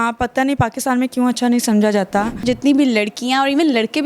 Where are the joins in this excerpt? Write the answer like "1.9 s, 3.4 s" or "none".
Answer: 2.4 s